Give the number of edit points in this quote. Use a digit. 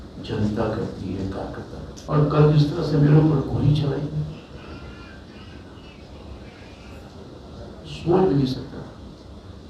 1